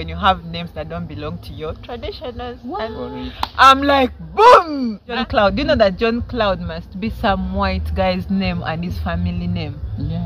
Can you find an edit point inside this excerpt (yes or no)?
yes